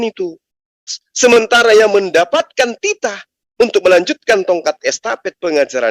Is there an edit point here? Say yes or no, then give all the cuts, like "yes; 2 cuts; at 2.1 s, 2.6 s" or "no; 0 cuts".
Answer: yes; 1 cut; at 1.0 s